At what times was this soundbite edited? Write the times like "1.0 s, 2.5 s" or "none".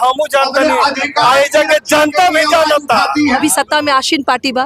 3.4 s